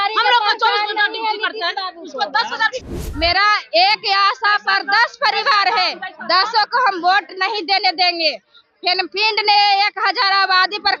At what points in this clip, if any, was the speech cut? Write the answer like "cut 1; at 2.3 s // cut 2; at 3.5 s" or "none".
cut 1; at 2.8 s